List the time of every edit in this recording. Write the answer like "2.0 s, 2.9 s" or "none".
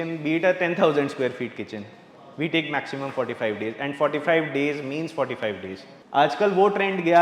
5.9 s